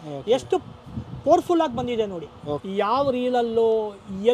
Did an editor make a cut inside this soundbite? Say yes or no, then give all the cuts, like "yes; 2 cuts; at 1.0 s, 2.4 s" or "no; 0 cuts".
yes; 1 cut; at 2.6 s